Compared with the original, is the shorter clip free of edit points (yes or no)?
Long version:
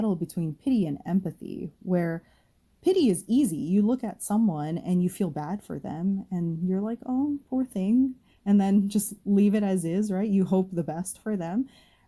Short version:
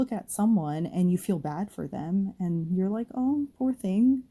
yes